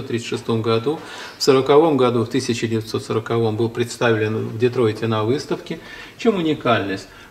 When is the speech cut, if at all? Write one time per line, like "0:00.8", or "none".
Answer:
none